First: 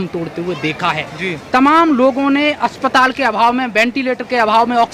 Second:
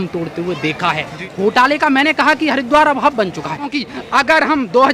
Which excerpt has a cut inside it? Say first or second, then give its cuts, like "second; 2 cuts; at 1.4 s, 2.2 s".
second; 2 cuts; at 1.3 s, 3.7 s